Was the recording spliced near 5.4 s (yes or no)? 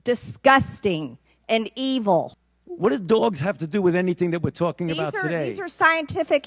no